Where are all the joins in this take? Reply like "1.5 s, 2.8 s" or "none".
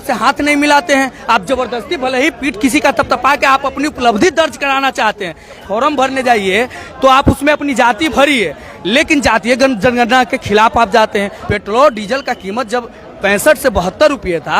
5.6 s, 11.4 s, 13.0 s